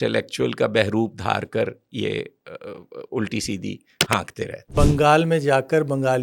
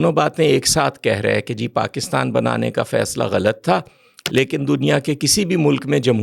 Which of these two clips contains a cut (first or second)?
first